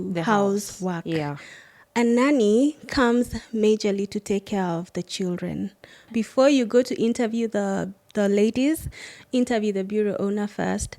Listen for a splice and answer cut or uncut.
cut